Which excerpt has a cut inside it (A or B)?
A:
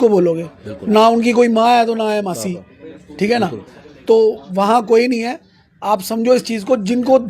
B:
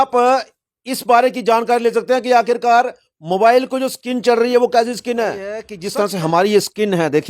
B